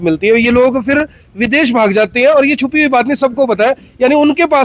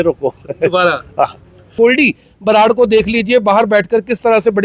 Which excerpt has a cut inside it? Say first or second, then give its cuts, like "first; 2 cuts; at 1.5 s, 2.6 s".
second; 1 cut; at 1.7 s